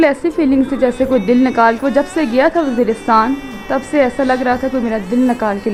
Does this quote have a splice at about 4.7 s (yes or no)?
no